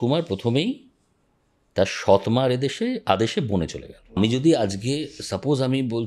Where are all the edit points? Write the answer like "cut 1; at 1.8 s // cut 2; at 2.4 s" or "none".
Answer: cut 1; at 4.2 s